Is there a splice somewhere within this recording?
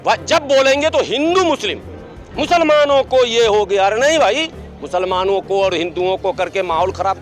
no; 0 cuts

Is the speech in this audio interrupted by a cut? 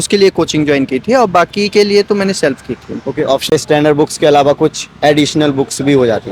yes; 1 cut; at 3.5 s

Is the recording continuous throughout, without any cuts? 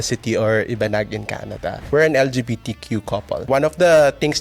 no; 2 cuts; at 1.8 s, 3.5 s

